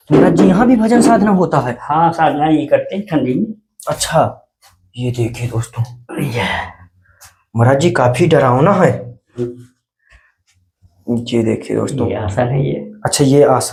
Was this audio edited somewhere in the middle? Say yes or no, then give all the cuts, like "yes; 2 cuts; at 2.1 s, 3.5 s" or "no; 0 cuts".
no; 0 cuts